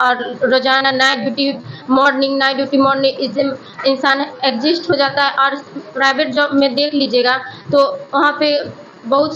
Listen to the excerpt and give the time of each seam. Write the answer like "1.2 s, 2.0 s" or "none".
none